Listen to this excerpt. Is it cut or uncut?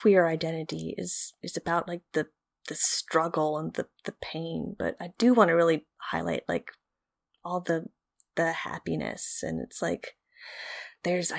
uncut